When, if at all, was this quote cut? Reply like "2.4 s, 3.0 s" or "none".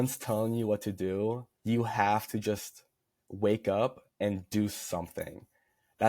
1.5 s, 4.0 s